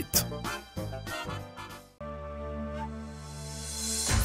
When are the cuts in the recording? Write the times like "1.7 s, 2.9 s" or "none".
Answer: none